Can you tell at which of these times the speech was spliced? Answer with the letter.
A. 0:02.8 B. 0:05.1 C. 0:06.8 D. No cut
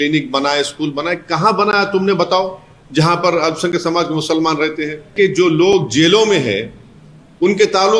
B